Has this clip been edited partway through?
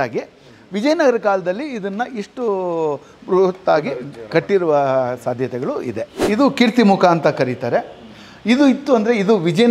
yes; 1 cut; at 6.2 s

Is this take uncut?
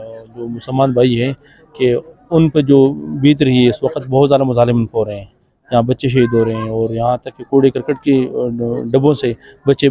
yes; 0 cuts

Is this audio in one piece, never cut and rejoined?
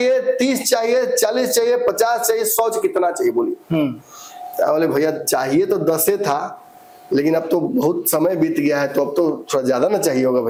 yes; 0 cuts

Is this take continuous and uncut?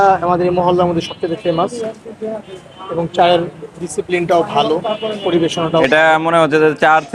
yes; 0 cuts

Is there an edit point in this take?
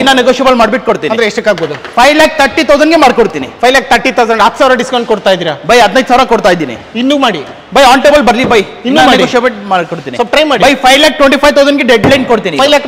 no; 0 cuts

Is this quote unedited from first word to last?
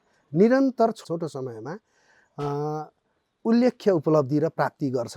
no; 1 cut; at 1.0 s

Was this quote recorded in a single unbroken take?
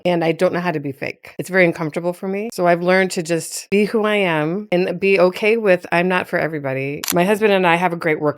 no; 3 cuts; at 2.5 s, 4.6 s, 7.0 s

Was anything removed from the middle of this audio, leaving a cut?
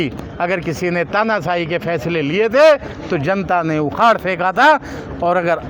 no; 0 cuts

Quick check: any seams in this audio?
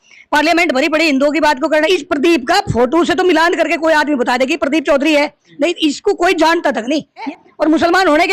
yes; 2 cuts; at 1.9 s, 7.3 s

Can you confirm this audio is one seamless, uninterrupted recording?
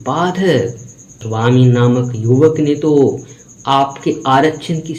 no; 1 cut; at 1.2 s

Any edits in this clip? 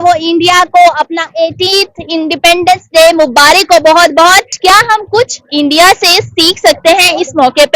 yes; 1 cut; at 4.5 s

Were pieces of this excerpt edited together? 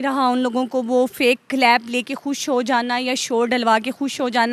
no; 0 cuts

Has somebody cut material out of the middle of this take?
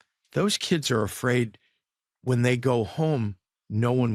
no; 0 cuts

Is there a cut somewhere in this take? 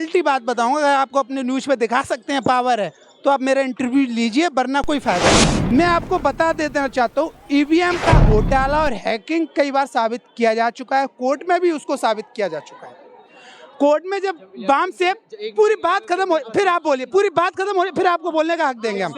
yes; 1 cut; at 5.5 s

